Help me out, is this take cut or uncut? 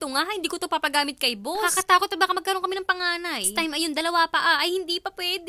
uncut